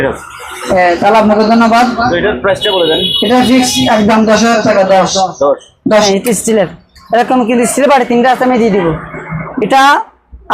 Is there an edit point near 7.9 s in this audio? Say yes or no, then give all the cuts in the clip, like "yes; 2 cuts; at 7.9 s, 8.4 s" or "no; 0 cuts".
no; 1 cut; at 6.0 s